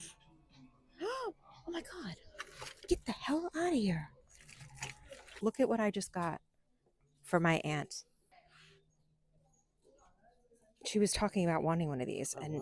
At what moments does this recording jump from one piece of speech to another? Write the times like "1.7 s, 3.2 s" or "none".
5.2 s, 8.3 s